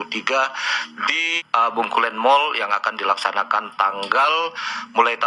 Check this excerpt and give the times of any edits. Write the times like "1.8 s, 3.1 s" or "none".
1.3 s